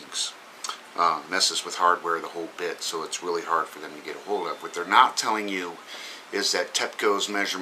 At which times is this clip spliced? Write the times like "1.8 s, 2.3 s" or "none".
2.8 s